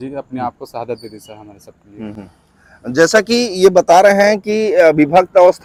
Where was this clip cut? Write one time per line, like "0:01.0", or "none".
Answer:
none